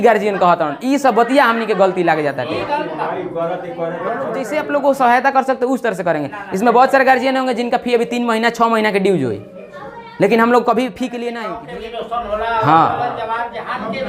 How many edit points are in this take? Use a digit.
2